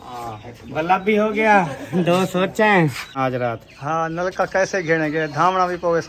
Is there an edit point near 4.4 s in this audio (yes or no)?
no